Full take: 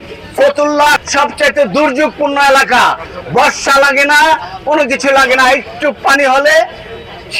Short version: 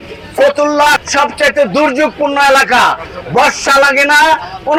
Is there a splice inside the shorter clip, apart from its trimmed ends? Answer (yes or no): no